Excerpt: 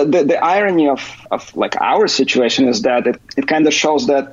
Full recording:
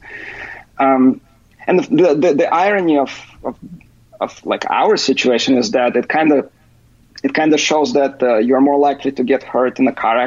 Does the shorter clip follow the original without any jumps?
no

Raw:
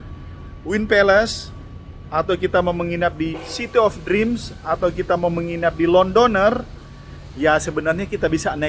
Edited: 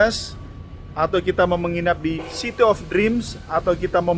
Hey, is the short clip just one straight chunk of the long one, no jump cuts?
yes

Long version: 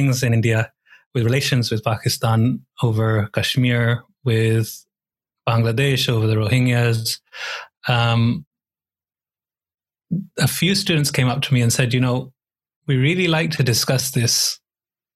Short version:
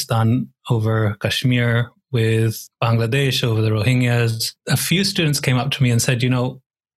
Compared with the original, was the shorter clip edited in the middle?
yes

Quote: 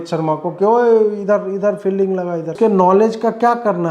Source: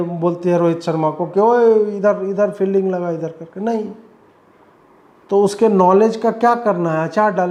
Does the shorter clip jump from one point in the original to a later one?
yes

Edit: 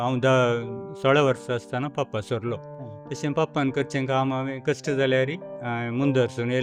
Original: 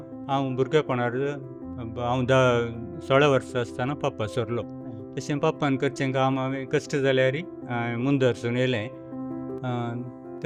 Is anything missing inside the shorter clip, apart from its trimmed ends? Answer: no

